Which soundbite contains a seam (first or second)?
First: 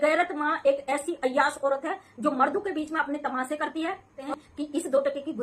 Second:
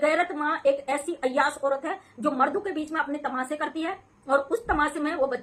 first